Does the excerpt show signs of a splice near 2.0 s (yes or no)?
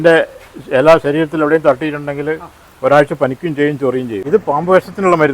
no